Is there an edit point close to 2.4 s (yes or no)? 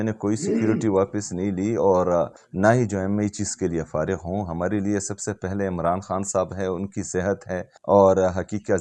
yes